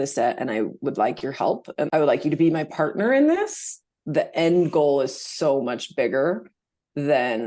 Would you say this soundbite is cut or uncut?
uncut